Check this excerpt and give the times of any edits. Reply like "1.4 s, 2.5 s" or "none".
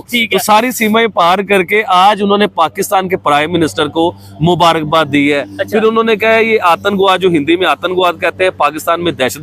none